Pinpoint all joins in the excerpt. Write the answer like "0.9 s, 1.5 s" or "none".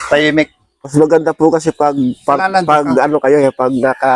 0.9 s